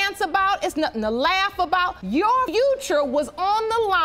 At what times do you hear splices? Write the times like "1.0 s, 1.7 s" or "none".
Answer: 2.5 s